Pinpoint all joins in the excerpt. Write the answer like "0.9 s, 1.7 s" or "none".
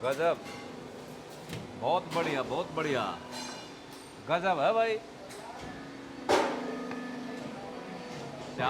none